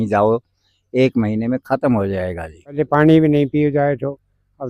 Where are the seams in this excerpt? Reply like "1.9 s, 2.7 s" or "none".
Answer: 2.7 s